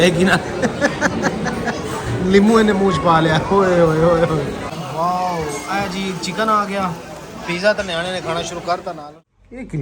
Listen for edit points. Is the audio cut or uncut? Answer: cut